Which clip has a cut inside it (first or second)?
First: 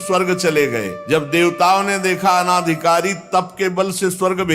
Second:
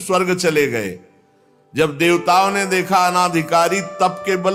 first